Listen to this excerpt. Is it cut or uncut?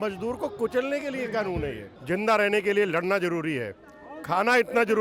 cut